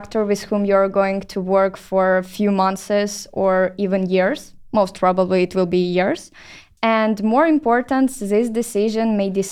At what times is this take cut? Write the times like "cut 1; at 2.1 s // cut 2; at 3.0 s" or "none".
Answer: none